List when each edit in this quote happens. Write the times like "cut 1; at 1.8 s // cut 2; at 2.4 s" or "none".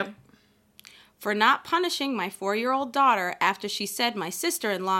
none